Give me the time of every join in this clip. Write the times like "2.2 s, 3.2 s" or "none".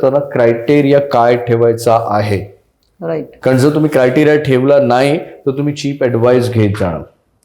none